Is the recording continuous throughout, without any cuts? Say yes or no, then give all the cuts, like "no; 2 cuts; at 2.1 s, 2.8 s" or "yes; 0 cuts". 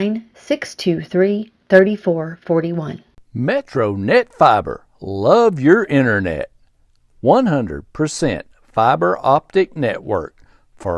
no; 1 cut; at 3.1 s